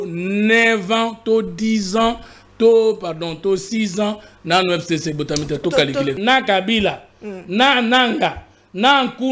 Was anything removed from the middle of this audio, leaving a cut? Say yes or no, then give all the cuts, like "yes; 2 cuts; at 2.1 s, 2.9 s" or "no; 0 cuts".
yes; 1 cut; at 6.2 s